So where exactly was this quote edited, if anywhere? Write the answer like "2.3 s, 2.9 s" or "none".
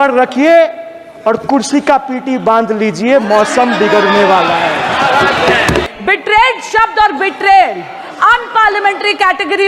5.9 s